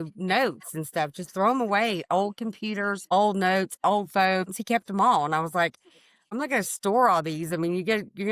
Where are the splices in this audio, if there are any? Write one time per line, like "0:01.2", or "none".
0:06.3